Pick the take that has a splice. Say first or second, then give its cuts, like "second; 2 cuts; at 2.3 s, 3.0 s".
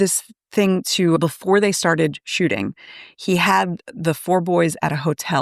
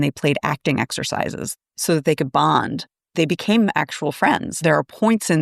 second; 3 cuts; at 1.5 s, 3.1 s, 4.6 s